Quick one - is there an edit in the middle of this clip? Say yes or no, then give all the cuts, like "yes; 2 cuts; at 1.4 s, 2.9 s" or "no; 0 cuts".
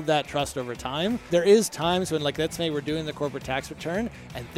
yes; 1 cut; at 1.2 s